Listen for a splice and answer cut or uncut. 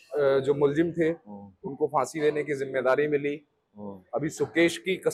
uncut